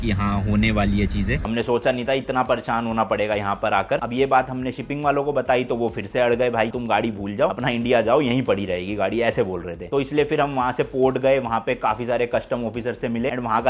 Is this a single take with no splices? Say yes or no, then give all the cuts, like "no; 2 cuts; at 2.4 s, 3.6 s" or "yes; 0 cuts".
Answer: no; 4 cuts; at 1.4 s, 4.0 s, 6.7 s, 9.9 s